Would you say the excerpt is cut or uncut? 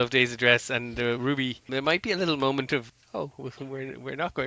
cut